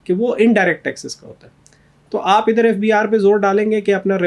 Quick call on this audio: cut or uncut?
uncut